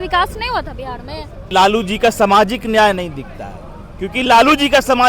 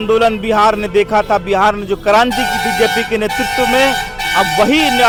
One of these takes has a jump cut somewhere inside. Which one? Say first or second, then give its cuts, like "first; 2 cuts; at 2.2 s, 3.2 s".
first; 1 cut; at 1.5 s